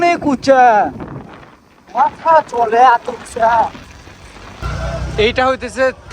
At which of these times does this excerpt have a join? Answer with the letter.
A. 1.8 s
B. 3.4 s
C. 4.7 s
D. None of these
C